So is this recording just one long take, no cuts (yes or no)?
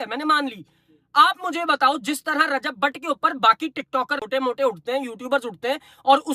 no